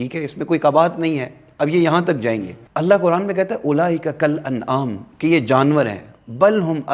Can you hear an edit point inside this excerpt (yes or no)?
no